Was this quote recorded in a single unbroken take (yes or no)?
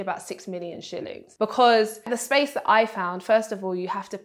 yes